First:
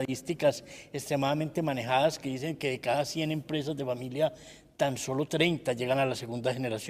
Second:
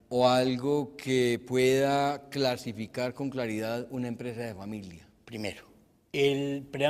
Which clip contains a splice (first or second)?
second